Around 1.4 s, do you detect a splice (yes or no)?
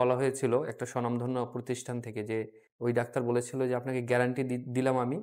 no